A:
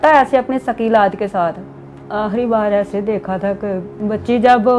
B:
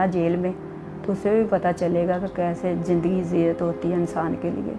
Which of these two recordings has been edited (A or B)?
A